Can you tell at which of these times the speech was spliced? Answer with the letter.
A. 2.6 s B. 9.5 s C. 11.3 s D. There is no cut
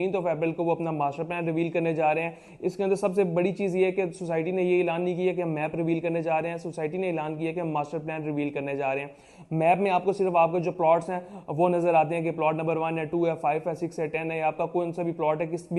D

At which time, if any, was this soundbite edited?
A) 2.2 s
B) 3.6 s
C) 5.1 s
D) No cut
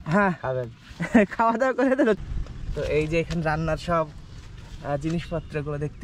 A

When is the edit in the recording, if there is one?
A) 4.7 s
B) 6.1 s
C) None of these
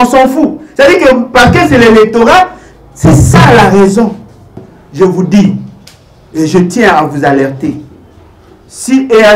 A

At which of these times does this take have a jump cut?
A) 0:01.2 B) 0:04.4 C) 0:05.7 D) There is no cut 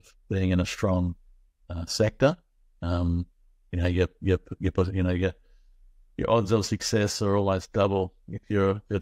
D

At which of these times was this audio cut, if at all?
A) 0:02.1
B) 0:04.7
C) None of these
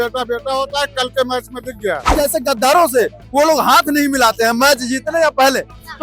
A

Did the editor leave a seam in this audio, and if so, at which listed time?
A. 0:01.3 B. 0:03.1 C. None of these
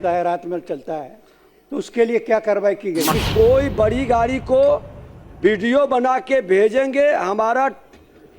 B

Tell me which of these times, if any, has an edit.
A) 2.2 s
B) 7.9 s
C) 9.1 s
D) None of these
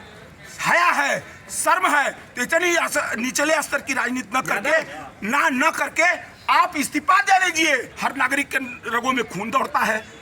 B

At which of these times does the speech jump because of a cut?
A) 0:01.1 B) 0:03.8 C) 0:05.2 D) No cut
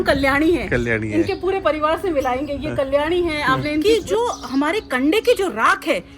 B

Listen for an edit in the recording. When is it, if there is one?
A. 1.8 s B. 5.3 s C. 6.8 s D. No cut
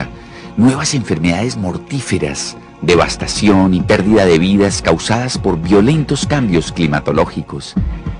D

